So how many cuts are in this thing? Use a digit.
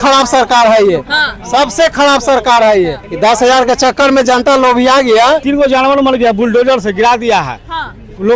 2